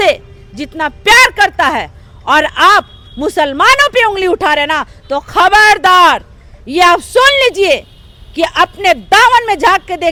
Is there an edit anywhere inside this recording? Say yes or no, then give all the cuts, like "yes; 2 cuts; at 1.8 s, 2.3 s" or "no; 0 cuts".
no; 0 cuts